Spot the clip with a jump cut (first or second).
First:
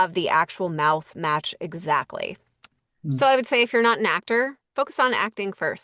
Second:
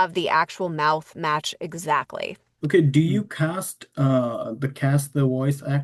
first